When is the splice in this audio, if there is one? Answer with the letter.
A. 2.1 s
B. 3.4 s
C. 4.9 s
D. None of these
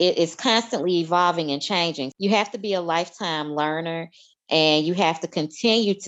A